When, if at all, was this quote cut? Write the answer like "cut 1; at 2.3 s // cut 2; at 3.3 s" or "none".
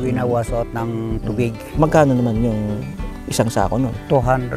cut 1; at 1.8 s